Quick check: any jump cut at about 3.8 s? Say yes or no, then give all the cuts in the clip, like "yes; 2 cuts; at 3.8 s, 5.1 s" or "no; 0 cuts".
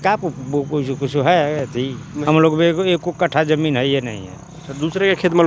no; 1 cut; at 2.1 s